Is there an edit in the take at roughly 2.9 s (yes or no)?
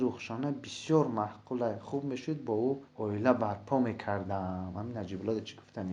yes